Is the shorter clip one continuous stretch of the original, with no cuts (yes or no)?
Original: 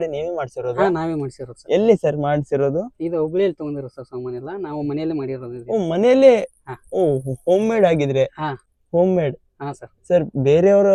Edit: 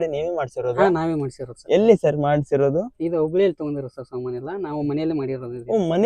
yes